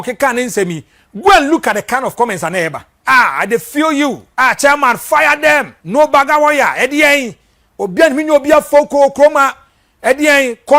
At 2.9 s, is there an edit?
yes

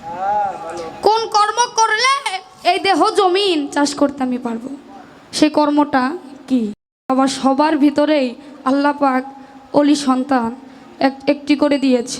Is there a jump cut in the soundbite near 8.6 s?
no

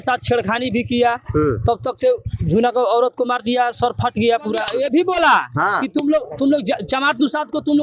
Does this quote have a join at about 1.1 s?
no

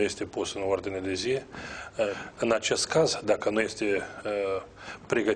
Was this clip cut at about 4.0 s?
no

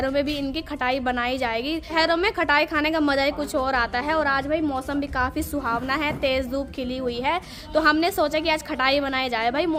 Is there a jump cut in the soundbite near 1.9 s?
no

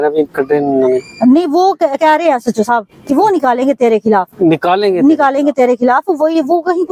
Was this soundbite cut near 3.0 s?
no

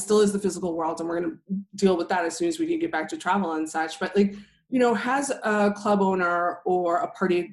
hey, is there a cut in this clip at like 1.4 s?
no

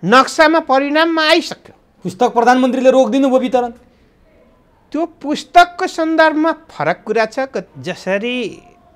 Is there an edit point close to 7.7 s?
yes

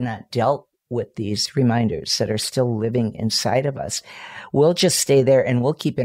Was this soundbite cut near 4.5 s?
no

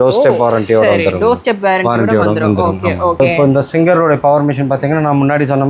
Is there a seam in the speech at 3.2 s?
yes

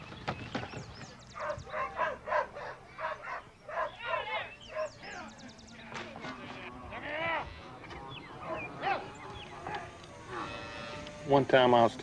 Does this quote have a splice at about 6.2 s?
no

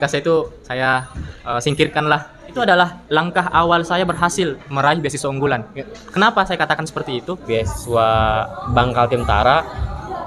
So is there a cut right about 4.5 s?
no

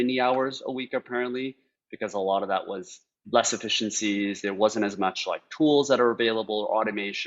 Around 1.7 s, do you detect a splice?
no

